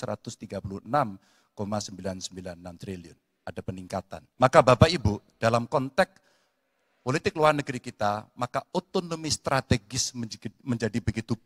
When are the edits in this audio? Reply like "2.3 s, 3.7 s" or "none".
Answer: 4.2 s